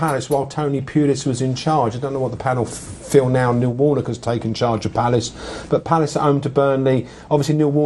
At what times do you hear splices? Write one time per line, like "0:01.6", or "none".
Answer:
0:02.8